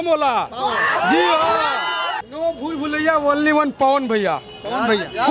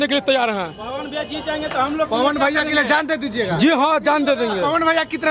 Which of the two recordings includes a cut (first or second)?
first